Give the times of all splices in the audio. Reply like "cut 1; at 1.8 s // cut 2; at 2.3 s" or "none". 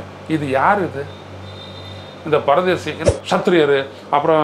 cut 1; at 2.9 s